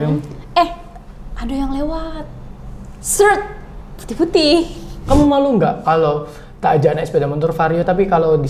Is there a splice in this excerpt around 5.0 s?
yes; 1 cut; at 5.0 s

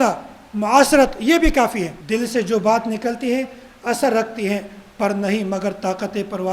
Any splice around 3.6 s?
no; 1 cut; at 2.0 s

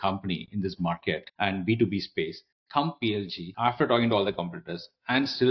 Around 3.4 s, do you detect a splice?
yes; 2 cuts; at 1.3 s, 3.4 s

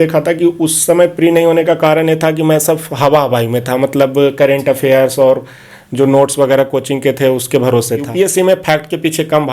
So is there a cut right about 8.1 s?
yes; 1 cut; at 8.1 s

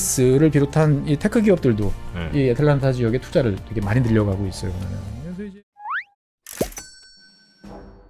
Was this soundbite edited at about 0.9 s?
no; 1 cut; at 5.4 s

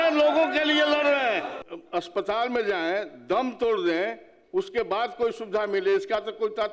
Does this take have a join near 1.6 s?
yes; 1 cut; at 1.6 s

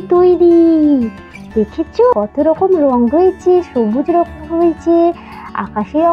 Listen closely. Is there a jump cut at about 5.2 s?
no; 1 cut; at 2.1 s

